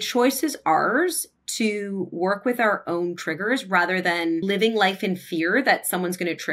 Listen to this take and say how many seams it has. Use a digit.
1